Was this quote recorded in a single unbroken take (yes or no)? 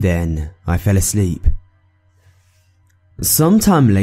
yes